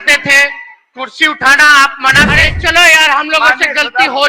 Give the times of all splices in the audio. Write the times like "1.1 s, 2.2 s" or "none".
2.4 s